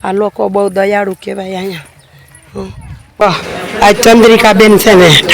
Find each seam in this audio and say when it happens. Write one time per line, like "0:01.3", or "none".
0:03.2